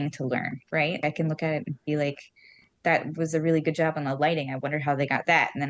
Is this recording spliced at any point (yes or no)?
no